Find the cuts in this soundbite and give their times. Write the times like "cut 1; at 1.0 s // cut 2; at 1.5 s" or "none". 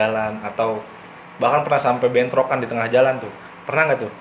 none